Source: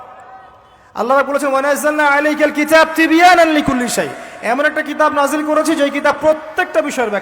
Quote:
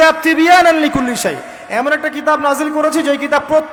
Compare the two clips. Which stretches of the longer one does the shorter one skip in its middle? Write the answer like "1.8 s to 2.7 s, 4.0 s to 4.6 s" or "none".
none